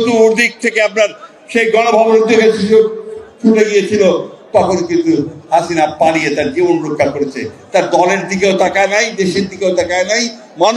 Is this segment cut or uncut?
uncut